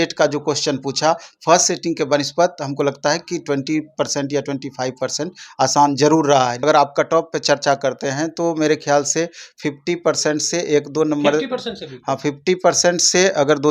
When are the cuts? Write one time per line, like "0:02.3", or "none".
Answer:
0:06.6